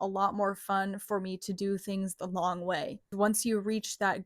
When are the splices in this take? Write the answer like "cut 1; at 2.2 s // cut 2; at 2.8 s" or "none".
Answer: cut 1; at 3.1 s